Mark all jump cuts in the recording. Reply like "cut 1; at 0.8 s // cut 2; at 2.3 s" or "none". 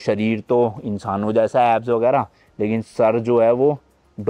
none

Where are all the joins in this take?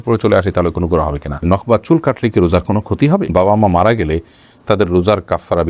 cut 1; at 1.4 s // cut 2; at 3.3 s

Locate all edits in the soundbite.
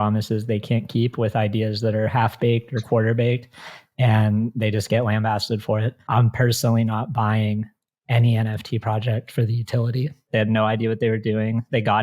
cut 1; at 6.0 s // cut 2; at 10.2 s

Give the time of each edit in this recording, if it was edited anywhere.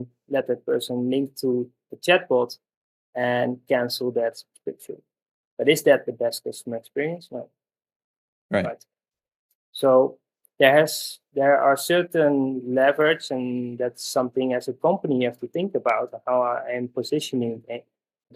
none

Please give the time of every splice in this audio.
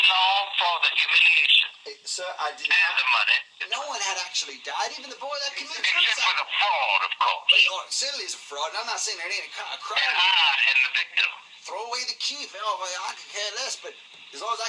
none

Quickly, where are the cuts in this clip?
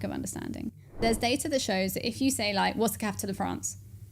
cut 1; at 1.0 s

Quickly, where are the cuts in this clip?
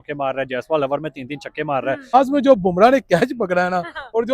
cut 1; at 2.1 s

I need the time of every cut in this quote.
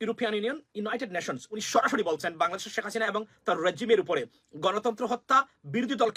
none

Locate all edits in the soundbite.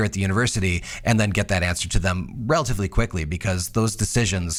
none

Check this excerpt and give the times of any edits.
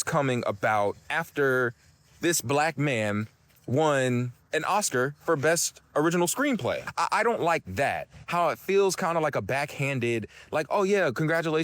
cut 1; at 6.9 s

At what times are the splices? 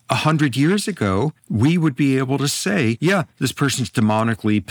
cut 1; at 1.4 s // cut 2; at 3.0 s

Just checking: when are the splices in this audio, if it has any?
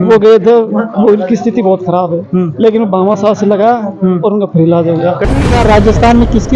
cut 1; at 5.4 s

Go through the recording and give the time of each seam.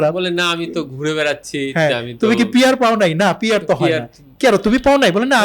none

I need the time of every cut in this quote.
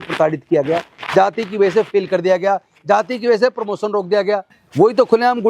cut 1; at 4.6 s

